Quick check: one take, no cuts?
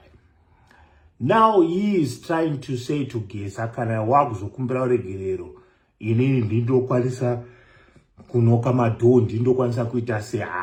yes; 0 cuts

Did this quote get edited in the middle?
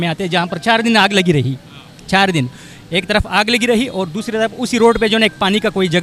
no; 0 cuts

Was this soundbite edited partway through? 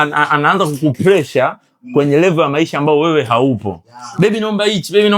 no; 0 cuts

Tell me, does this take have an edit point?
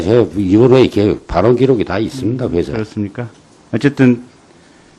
no; 0 cuts

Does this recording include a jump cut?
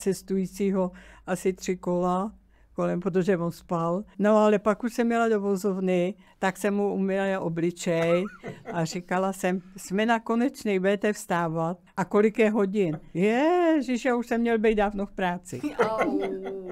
yes; 4 cuts; at 4.1 s, 6.2 s, 11.8 s, 13.1 s

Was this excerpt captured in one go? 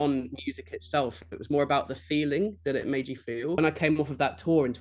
no; 1 cut; at 3.6 s

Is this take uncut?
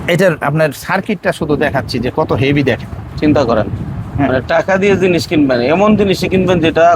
yes; 0 cuts

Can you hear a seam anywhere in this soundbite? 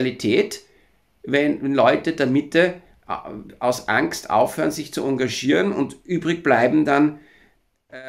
no; 0 cuts

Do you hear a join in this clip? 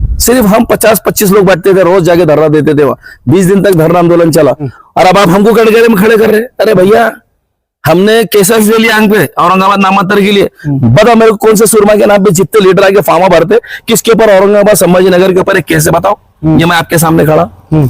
yes; 1 cut; at 4.7 s

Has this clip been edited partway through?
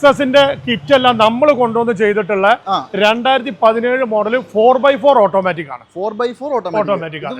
no; 0 cuts

